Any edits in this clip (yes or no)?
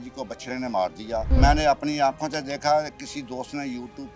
yes